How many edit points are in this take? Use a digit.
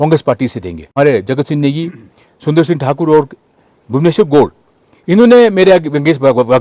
1